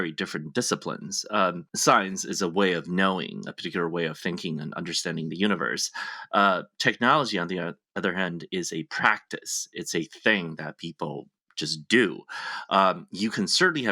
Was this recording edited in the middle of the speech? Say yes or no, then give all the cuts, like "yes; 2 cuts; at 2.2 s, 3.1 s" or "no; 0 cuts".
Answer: yes; 1 cut; at 1.7 s